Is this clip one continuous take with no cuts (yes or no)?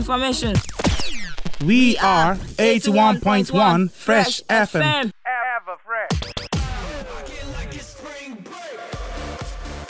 no